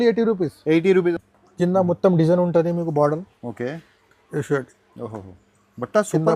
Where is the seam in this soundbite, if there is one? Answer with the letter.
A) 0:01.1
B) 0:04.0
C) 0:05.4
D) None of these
A